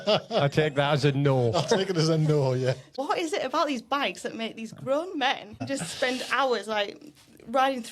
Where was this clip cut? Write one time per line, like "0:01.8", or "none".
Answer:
0:02.9
0:05.6